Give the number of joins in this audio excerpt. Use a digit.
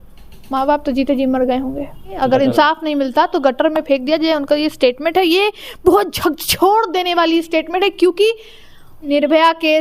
2